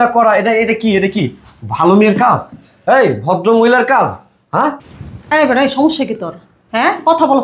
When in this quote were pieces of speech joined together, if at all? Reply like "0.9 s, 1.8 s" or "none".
4.9 s